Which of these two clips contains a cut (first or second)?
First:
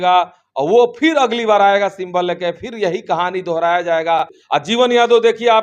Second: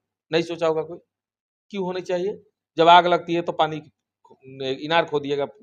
first